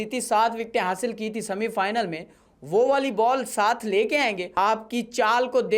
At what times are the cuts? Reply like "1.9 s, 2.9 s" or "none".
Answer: 4.5 s